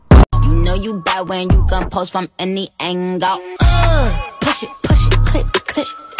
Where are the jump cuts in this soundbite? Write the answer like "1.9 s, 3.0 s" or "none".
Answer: none